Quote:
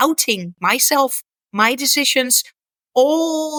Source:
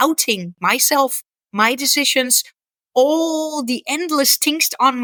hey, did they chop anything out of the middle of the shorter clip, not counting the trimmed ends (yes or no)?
no